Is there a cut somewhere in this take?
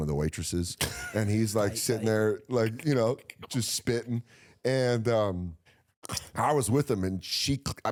no; 0 cuts

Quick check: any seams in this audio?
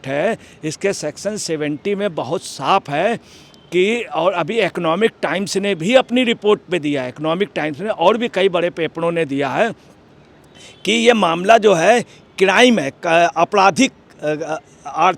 no; 0 cuts

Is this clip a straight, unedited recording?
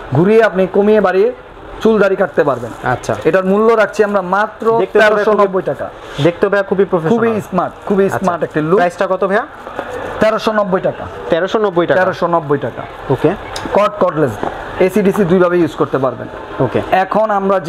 yes; 0 cuts

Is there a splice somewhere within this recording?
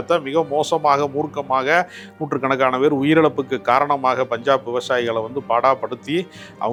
no; 0 cuts

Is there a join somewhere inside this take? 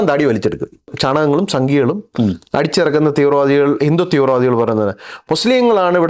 yes; 1 cut; at 0.9 s

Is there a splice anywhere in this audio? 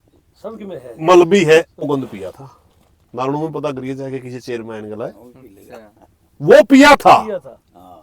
yes; 1 cut; at 1.9 s

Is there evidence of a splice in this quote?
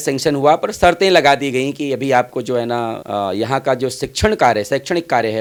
no; 0 cuts

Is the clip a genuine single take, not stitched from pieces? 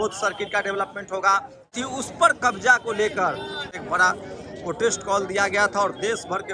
no; 2 cuts; at 1.7 s, 3.7 s

